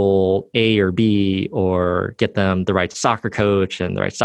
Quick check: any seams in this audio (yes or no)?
yes